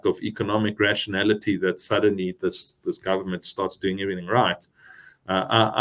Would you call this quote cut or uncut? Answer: uncut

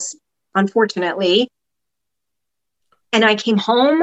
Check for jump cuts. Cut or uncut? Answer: uncut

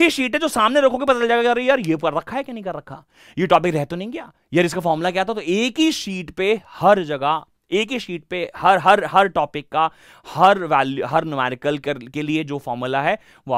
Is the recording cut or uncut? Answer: uncut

